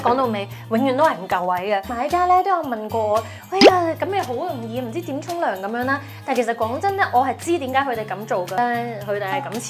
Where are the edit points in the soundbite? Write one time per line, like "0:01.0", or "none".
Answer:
0:01.9
0:08.6

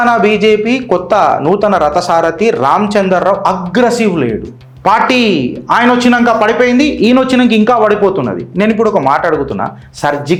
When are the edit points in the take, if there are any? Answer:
none

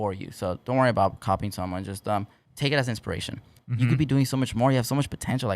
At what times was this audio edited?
0:02.4
0:03.6

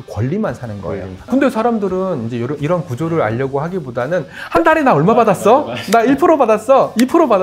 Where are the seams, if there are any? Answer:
0:01.2

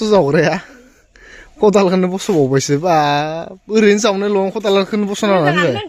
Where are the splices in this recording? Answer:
none

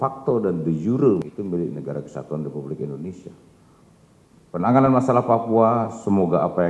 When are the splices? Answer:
0:01.2

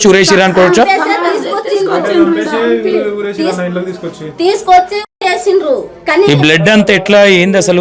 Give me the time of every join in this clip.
none

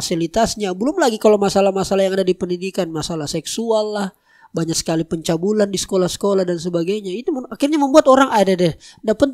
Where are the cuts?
none

